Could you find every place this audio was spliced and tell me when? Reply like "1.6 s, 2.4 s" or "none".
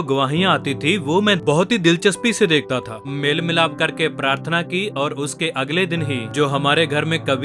1.4 s, 3.1 s, 6.3 s